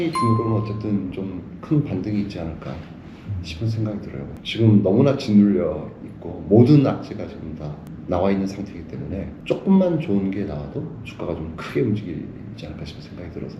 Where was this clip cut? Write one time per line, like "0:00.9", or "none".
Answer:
0:04.4
0:09.3